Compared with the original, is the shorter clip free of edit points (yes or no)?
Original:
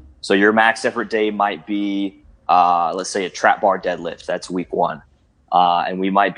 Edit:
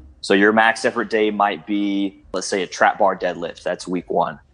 no